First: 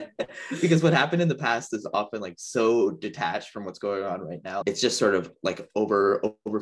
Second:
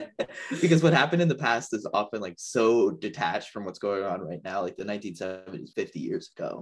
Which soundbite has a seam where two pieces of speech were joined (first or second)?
first